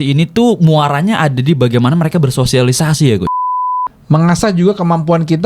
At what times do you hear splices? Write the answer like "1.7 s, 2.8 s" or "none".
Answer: 3.4 s